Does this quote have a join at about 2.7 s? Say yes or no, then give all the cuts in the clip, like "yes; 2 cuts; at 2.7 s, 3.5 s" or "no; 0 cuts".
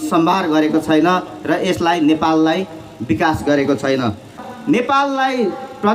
no; 1 cut; at 4.4 s